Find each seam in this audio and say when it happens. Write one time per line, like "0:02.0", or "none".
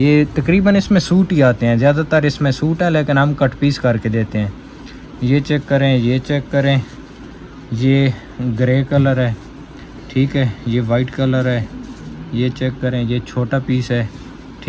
none